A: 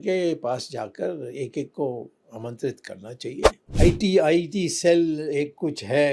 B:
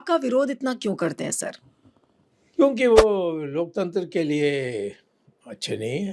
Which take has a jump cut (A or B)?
A